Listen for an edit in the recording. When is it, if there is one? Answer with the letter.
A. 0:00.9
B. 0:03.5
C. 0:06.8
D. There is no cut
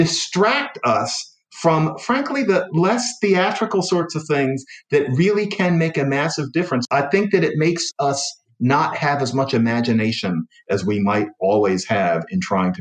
C